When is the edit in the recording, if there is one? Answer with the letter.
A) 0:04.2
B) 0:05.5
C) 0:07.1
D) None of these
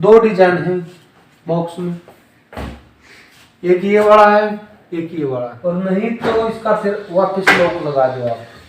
B